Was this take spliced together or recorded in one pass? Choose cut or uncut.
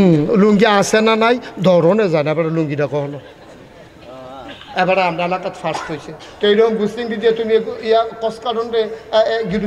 uncut